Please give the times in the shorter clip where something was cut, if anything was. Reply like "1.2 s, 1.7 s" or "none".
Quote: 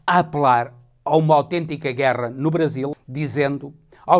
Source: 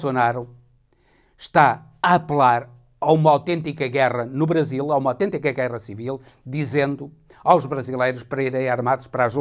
2.9 s